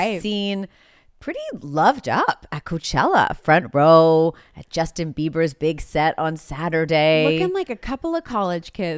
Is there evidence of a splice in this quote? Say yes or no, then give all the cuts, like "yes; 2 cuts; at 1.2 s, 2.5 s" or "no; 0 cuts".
no; 0 cuts